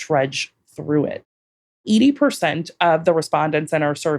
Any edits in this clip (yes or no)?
yes